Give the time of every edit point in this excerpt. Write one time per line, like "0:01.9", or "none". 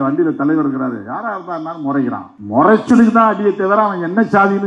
0:02.3